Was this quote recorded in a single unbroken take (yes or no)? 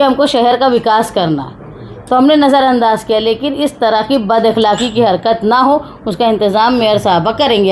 yes